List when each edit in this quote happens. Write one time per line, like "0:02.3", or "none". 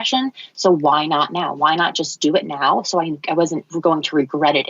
0:03.7